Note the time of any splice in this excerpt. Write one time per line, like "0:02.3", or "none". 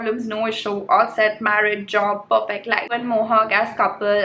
0:02.9

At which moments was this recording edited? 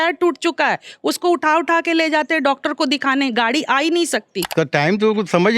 0:04.4

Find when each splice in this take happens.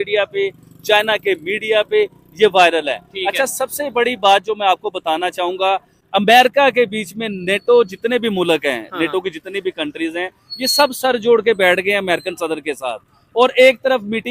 none

